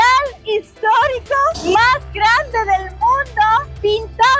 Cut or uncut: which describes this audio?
uncut